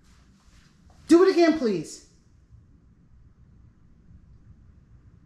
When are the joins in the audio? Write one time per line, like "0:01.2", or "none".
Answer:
none